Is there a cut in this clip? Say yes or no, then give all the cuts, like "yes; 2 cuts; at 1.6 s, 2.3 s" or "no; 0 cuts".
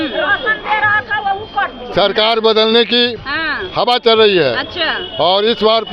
no; 0 cuts